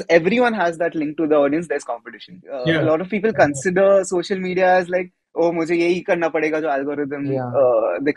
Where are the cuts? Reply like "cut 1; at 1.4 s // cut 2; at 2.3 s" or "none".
cut 1; at 2.5 s